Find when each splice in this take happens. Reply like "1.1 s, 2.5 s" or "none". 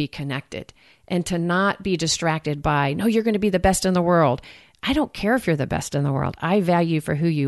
none